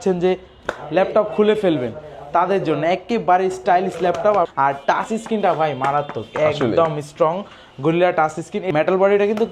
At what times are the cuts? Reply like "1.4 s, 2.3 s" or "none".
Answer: 4.5 s, 8.7 s